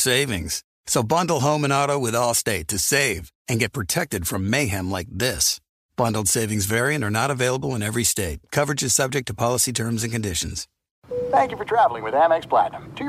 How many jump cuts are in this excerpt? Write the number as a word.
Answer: one